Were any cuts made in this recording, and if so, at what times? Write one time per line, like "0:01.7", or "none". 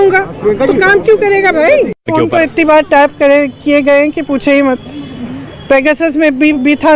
0:02.1